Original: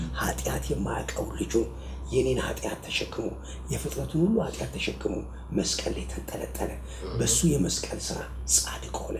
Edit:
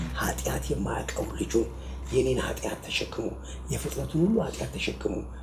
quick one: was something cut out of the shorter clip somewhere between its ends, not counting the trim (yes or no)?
no